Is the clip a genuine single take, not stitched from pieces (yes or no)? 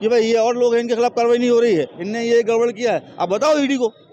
yes